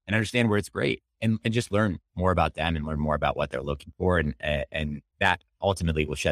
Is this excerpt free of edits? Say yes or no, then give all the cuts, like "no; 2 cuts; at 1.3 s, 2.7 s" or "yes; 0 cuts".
no; 1 cut; at 5.0 s